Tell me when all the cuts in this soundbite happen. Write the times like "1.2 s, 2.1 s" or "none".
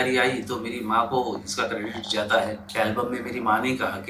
2.7 s